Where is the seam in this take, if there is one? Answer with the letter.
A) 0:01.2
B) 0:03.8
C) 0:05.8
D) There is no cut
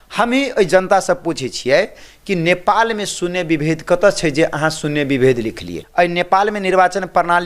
C